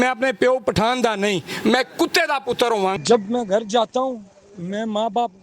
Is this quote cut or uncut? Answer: cut